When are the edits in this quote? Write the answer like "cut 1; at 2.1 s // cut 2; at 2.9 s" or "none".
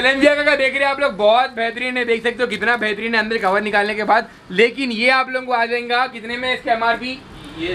none